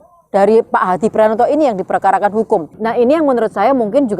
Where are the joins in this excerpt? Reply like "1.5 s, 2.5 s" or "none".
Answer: 2.8 s